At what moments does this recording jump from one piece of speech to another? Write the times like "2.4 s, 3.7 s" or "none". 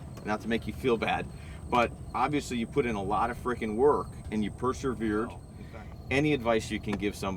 5.5 s